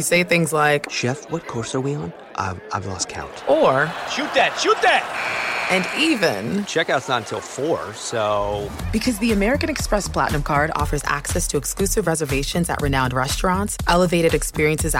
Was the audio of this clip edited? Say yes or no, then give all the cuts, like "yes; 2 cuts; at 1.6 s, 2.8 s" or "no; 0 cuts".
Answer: no; 0 cuts